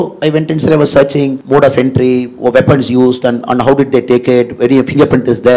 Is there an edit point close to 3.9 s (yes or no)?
no